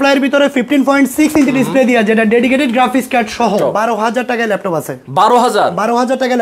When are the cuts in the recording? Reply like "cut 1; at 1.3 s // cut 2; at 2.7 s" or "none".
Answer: cut 1; at 3.6 s